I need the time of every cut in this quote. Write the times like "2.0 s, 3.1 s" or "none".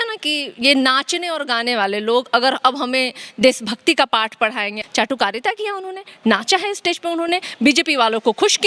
4.7 s